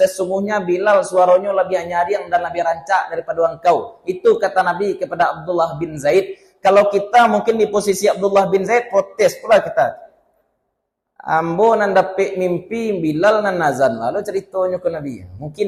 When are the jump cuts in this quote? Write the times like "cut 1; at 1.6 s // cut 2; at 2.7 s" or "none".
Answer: none